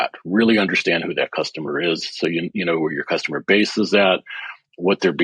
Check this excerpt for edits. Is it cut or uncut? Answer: uncut